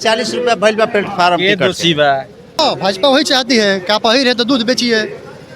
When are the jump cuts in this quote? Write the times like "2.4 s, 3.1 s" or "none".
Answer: 2.6 s